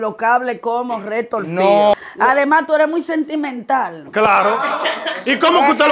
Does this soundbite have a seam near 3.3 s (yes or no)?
no